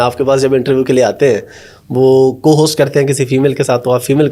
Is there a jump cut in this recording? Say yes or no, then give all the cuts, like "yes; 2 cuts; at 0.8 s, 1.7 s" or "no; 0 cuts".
no; 0 cuts